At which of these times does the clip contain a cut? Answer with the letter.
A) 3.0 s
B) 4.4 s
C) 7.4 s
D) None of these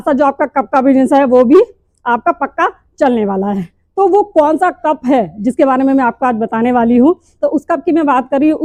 D